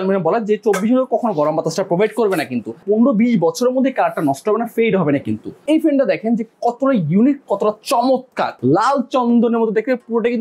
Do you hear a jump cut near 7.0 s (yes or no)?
no